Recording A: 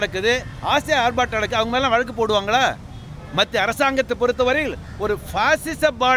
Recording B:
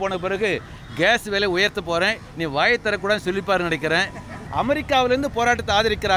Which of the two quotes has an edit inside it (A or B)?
B